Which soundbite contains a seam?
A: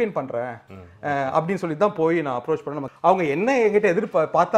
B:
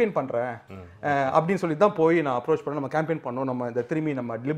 A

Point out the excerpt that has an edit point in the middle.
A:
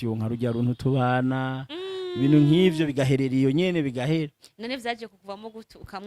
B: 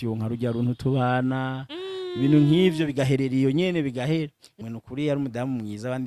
B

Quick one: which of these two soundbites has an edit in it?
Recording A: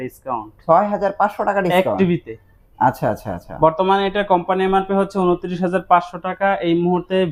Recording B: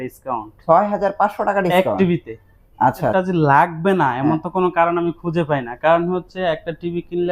B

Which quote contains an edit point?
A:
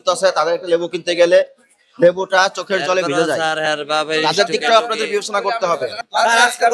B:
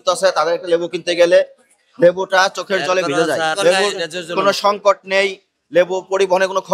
B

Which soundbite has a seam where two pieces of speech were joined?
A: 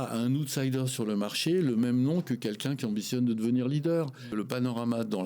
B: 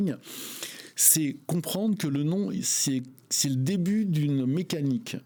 A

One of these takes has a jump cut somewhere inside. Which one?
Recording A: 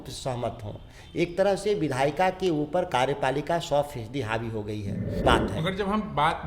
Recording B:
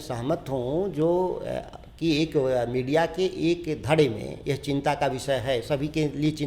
A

